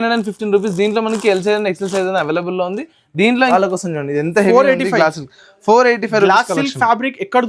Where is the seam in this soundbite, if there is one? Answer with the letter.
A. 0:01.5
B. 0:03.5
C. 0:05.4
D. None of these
B